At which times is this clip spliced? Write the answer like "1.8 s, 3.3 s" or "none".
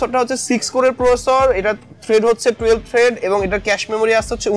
none